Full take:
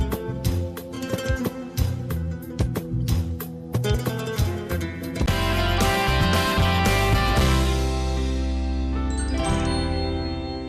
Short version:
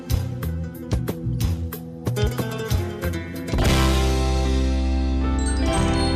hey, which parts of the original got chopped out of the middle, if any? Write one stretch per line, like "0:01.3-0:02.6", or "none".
0:05.3-0:07.3